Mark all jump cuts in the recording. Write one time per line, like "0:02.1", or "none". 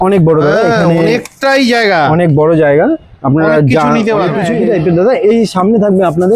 0:04.5